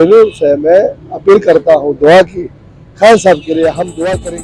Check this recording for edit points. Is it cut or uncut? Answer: uncut